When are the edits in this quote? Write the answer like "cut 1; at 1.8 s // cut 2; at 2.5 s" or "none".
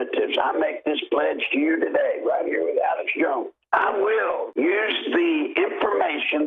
cut 1; at 3.6 s // cut 2; at 4.5 s